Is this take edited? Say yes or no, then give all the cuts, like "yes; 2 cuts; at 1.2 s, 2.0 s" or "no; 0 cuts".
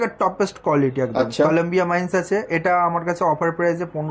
no; 0 cuts